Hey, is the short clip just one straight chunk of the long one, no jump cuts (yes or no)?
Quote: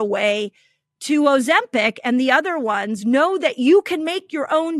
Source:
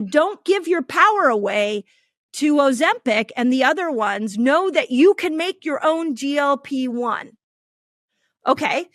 yes